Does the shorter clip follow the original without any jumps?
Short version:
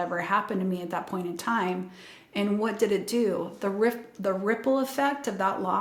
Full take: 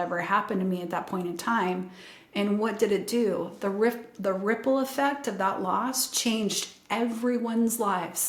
yes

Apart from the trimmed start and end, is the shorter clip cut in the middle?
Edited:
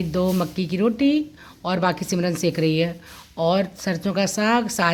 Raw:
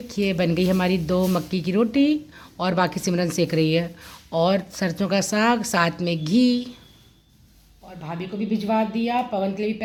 no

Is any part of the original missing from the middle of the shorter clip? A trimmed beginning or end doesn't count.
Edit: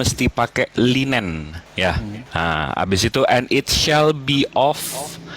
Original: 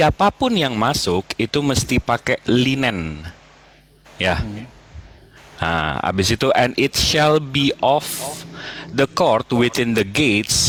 yes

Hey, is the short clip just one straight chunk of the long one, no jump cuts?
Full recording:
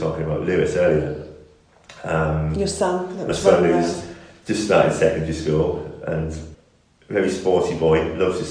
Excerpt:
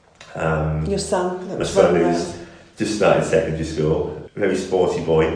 no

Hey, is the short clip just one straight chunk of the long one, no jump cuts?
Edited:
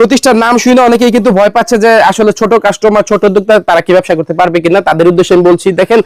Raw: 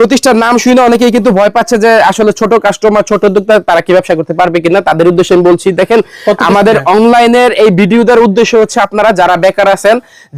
yes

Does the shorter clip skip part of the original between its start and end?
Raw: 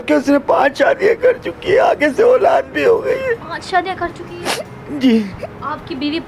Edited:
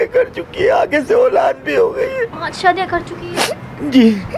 no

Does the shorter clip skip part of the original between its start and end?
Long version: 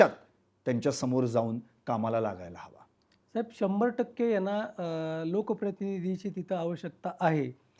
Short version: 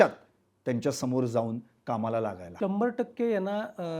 yes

